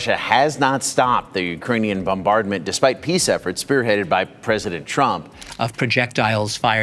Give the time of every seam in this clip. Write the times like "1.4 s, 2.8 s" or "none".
5.4 s